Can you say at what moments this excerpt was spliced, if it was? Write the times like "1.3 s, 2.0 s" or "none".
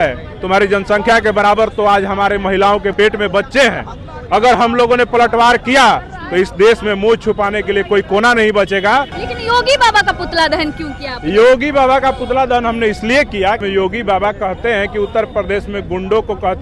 2.9 s, 9.2 s, 13.6 s